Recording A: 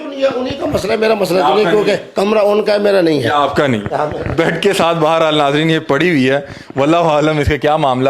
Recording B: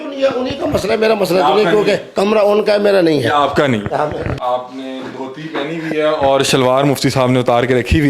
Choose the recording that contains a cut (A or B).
B